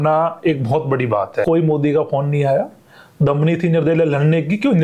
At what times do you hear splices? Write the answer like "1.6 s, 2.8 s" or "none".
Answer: 1.4 s

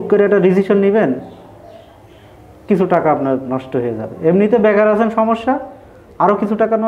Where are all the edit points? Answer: none

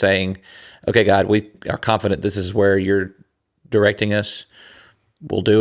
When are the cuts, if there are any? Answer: 1.6 s

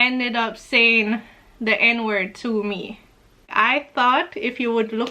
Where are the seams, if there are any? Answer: 3.5 s

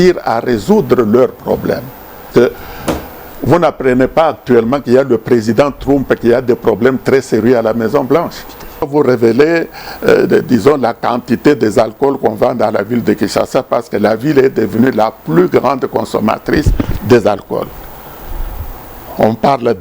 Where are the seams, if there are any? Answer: 2.3 s, 8.9 s

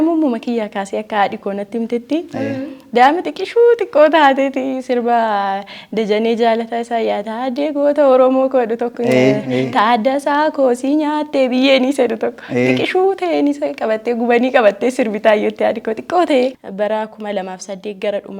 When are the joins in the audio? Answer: 16.6 s

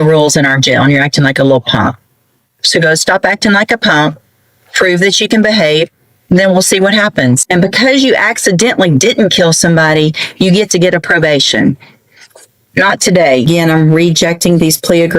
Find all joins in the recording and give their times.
7.5 s, 13.6 s

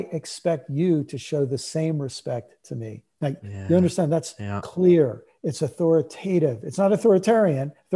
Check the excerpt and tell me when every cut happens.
none

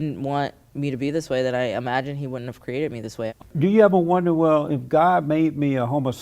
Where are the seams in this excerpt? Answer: 3.3 s

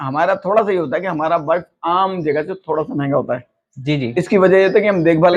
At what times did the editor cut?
none

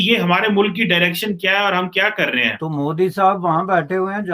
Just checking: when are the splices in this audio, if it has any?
2.6 s

